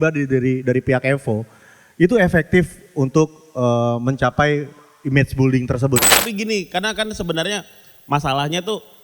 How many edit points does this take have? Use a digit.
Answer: 1